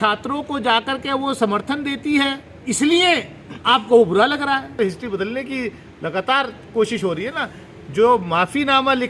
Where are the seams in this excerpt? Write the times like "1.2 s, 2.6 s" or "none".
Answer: 2.6 s, 4.7 s